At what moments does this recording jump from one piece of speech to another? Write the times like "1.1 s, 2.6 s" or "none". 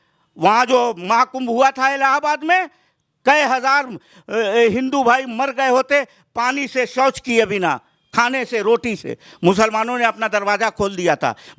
none